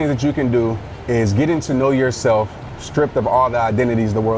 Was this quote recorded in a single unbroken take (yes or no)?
yes